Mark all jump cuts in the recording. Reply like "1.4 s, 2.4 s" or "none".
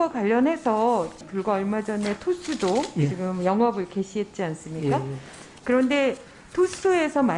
1.2 s